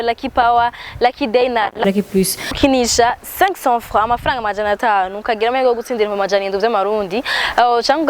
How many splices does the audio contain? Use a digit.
1